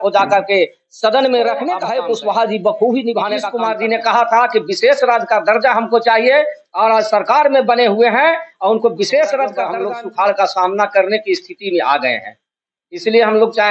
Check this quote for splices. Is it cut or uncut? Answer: cut